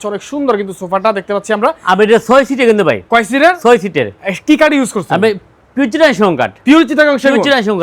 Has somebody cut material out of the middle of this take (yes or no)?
no